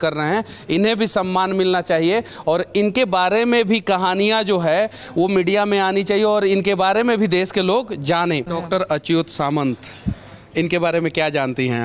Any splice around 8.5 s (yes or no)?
yes